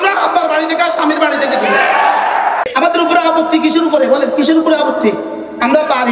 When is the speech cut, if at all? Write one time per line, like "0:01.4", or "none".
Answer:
0:02.7